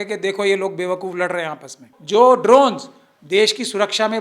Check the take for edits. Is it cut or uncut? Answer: cut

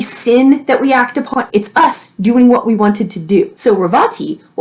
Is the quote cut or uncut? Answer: cut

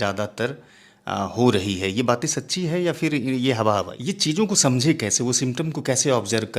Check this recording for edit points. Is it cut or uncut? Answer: cut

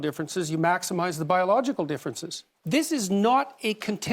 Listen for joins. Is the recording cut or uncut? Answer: cut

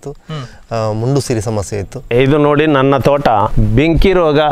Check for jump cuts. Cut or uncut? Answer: cut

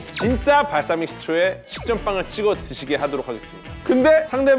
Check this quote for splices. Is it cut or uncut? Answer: cut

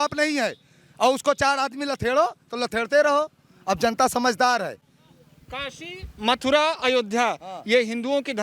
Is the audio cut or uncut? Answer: uncut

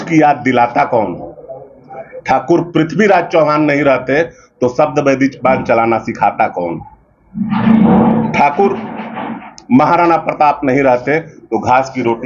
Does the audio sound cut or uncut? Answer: uncut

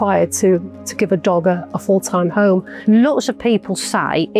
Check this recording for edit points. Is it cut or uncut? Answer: cut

